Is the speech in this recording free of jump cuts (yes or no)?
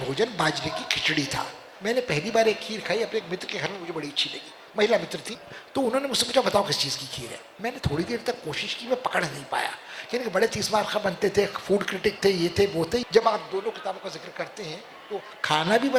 no